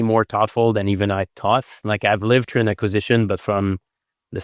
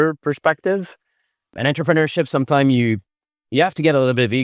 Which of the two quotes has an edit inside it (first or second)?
second